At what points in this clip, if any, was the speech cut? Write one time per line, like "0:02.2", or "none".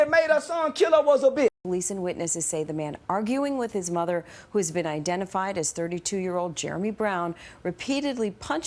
0:01.5